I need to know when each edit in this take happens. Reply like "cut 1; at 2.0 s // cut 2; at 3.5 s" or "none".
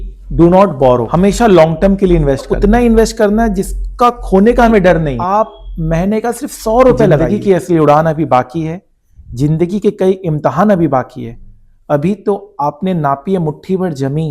cut 1; at 1.1 s // cut 2; at 2.5 s // cut 3; at 5.2 s // cut 4; at 7.2 s